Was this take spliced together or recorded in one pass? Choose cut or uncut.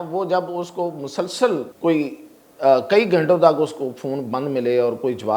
cut